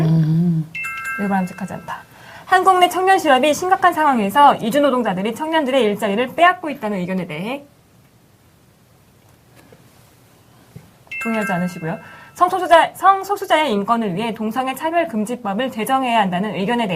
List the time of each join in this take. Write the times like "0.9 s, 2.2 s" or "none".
5.1 s

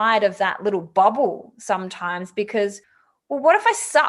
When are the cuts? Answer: none

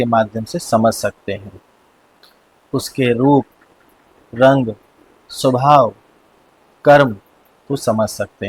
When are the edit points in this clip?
none

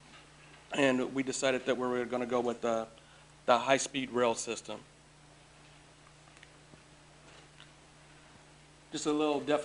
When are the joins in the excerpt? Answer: 4.2 s

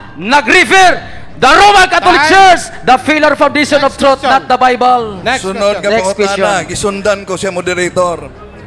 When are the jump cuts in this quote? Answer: 2.7 s

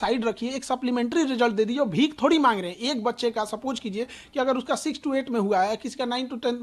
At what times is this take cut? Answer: none

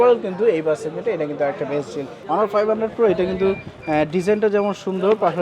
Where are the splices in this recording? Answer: 2.1 s

